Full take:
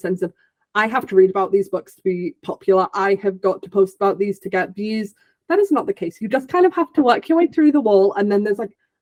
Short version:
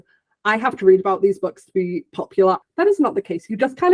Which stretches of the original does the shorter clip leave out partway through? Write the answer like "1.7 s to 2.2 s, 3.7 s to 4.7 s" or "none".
2.9 s to 5.3 s

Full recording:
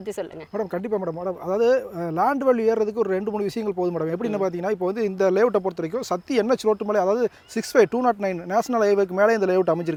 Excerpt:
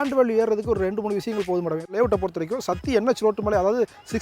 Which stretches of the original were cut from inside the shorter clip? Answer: 4.2 s to 5.4 s

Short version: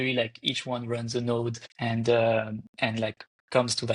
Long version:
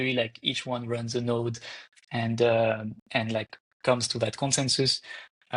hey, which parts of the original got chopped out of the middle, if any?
1.7 s to 2.0 s

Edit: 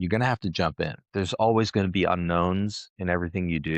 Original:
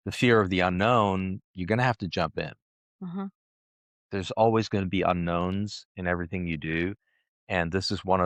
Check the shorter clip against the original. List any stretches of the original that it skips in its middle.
2.6 s to 4.0 s

